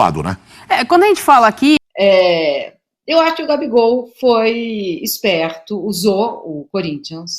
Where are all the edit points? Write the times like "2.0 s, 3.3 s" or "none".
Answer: 1.8 s